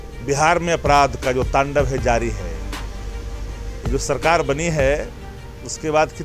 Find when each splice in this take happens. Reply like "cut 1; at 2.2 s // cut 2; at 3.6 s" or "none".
none